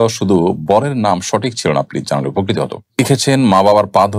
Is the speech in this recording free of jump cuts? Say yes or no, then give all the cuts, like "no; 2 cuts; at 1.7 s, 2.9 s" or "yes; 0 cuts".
no; 1 cut; at 3.0 s